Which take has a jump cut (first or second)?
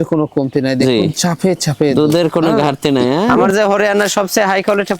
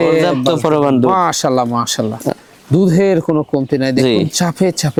first